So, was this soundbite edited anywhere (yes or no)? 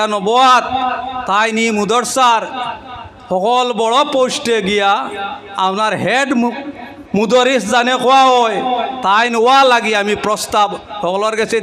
no